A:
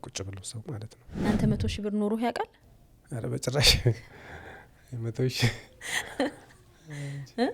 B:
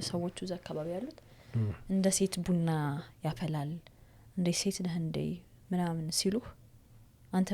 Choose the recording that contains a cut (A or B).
A